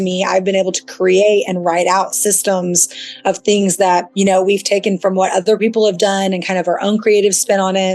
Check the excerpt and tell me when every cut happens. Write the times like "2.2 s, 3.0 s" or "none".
4.1 s